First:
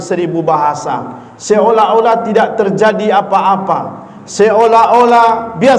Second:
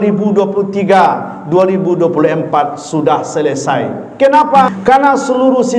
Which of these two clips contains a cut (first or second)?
second